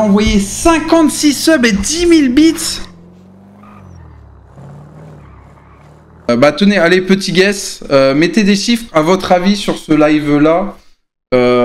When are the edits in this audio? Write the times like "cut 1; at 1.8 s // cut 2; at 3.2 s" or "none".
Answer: cut 1; at 6.3 s